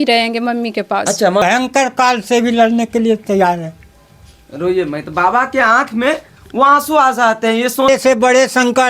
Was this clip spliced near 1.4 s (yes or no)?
yes